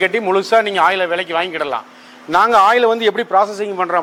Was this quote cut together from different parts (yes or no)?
no